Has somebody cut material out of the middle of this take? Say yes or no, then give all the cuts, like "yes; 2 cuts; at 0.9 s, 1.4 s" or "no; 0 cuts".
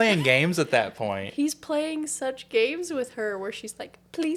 no; 0 cuts